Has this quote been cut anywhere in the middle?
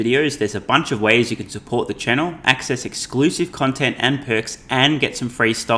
no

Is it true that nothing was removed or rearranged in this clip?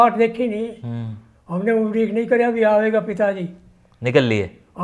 yes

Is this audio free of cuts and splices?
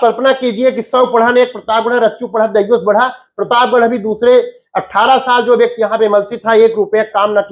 yes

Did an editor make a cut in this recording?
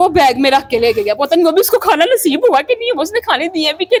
no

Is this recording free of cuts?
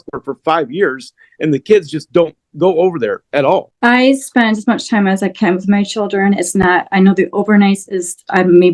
no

